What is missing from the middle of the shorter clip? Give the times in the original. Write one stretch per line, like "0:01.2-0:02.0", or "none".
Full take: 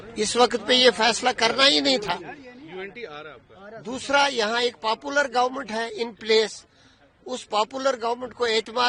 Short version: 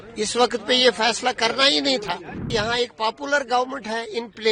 0:02.5-0:04.3